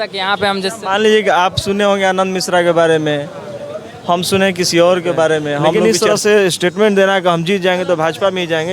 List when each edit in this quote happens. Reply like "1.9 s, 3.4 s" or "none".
5.8 s